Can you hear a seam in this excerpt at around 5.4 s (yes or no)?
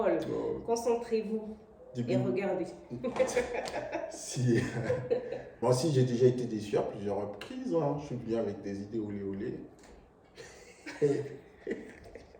yes